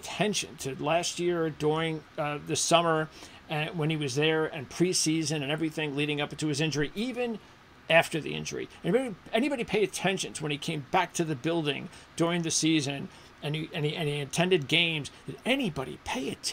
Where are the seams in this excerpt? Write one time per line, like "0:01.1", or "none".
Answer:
none